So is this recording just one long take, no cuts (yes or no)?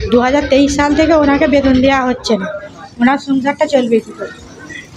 yes